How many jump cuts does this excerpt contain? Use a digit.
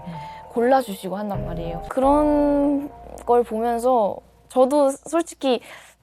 1